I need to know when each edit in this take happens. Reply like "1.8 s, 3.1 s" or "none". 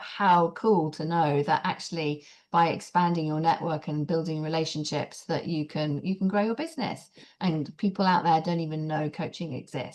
none